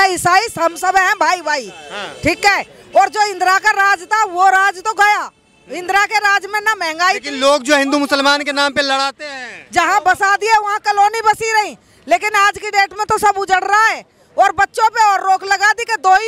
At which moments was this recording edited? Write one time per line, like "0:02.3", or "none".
none